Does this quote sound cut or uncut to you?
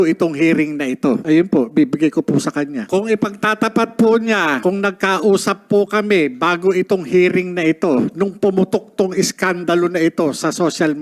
cut